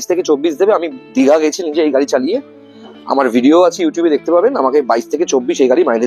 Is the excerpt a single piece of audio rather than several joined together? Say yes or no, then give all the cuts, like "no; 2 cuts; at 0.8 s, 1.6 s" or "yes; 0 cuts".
yes; 0 cuts